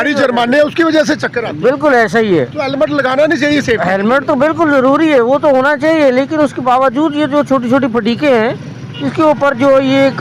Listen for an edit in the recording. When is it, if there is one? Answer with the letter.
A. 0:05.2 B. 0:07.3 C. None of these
C